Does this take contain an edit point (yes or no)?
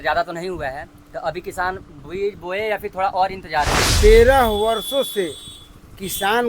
yes